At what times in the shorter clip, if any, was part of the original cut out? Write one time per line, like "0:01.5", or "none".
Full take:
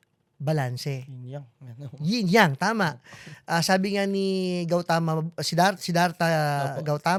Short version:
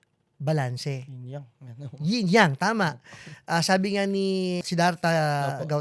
0:04.6